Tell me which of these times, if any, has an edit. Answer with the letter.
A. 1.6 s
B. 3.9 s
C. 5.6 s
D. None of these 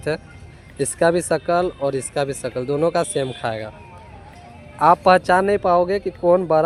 D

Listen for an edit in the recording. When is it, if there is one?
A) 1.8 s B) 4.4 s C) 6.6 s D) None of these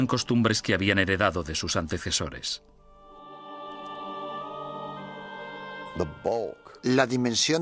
B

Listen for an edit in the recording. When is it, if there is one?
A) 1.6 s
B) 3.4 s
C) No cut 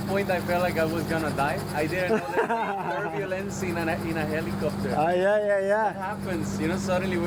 C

